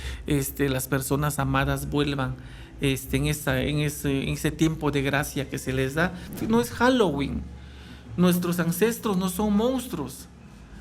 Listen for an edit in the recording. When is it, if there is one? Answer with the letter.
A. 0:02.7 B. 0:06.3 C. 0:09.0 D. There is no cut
B